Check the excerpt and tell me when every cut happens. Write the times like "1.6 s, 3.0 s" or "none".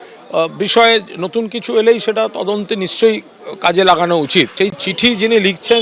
4.5 s